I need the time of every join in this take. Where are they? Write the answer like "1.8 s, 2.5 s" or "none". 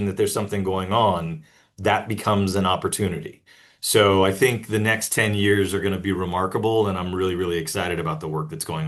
none